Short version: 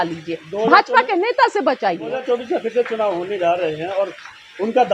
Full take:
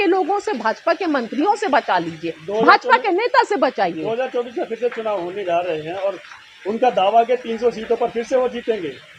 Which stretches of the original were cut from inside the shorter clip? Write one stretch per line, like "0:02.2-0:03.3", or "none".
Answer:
0:04.1-0:04.2